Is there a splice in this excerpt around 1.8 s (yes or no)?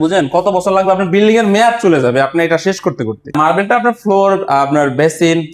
no